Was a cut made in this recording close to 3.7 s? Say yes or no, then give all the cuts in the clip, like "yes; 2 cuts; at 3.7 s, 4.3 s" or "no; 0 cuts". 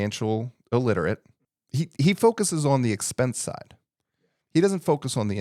no; 1 cut; at 1.3 s